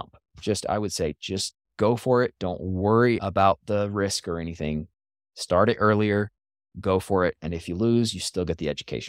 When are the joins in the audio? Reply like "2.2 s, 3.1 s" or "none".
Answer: 3.2 s